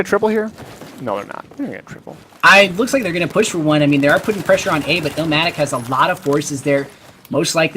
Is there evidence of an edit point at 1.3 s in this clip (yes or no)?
yes